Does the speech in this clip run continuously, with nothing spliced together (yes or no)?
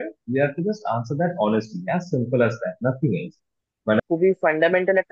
no